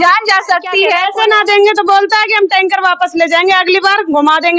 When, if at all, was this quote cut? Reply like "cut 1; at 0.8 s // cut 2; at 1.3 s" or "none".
cut 1; at 1.0 s